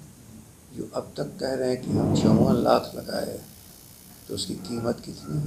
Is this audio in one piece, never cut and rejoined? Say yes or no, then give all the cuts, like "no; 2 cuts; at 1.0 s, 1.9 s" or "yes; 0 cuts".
yes; 0 cuts